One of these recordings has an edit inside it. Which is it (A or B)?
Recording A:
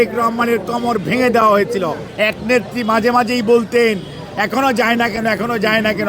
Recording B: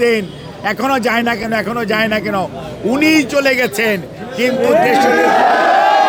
A